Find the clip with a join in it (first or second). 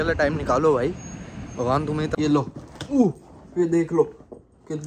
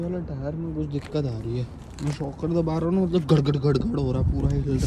first